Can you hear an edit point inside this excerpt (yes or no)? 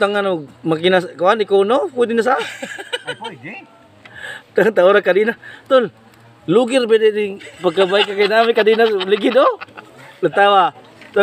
no